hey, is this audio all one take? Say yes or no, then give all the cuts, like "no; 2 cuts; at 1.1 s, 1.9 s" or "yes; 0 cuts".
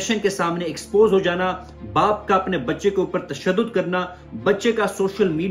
yes; 0 cuts